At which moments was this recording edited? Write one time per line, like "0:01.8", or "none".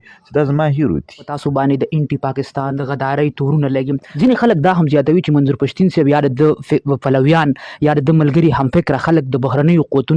0:01.3
0:02.8
0:04.1